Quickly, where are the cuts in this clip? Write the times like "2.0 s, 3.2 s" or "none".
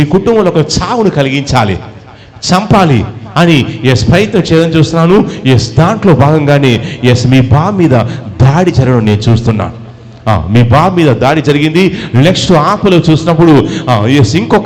none